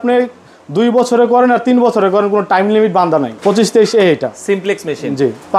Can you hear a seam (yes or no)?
yes